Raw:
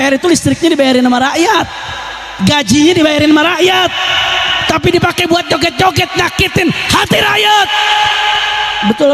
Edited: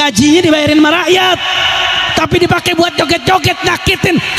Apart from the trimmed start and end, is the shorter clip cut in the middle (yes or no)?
no